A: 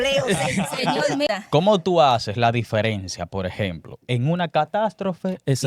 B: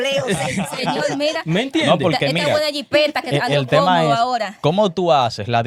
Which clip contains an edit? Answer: A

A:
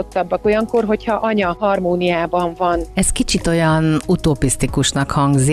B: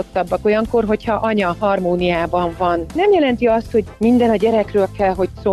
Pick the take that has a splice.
B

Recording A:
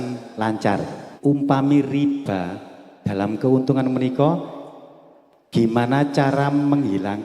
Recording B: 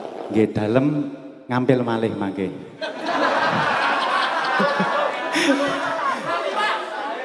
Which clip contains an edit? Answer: A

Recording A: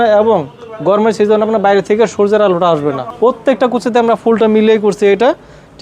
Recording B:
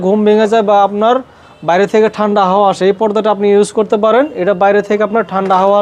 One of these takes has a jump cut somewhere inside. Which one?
A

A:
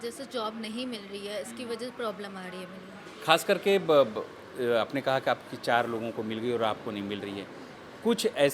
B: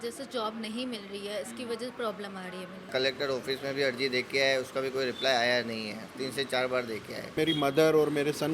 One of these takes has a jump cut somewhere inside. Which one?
B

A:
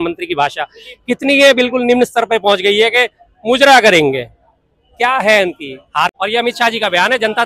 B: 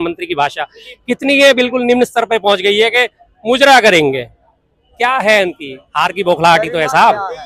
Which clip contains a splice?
A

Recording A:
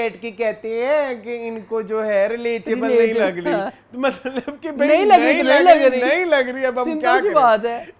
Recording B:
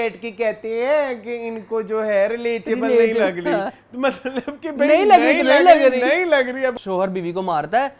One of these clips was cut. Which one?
B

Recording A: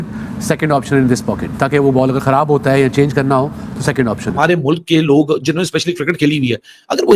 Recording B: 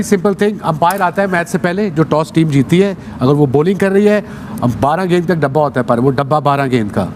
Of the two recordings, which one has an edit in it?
A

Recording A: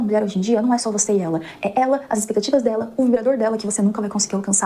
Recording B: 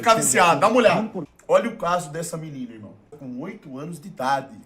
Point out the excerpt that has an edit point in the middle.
B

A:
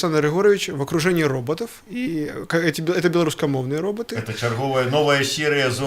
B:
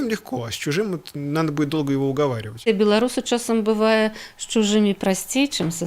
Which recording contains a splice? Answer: B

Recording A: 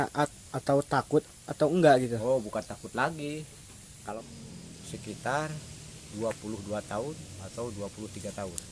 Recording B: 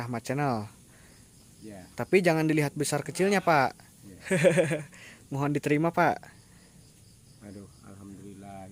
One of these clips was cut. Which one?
A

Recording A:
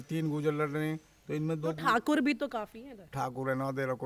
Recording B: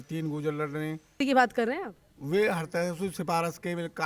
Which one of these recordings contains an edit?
B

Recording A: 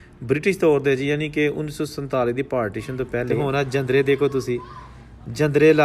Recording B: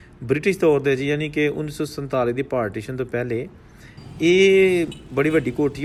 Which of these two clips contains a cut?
A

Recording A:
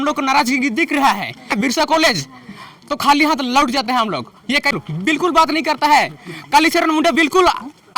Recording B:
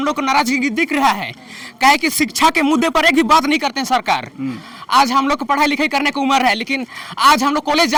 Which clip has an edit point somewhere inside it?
A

